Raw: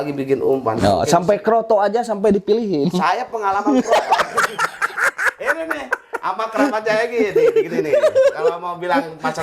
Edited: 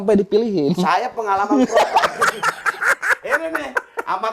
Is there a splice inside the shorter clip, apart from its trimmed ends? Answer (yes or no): no